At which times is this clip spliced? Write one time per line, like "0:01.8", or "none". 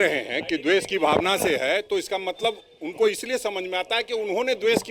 none